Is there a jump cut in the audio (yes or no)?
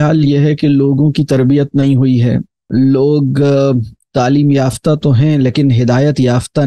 yes